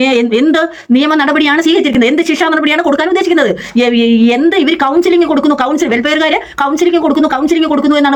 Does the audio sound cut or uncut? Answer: uncut